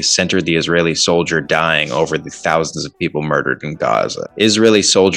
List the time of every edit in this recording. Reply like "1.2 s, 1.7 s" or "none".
4.2 s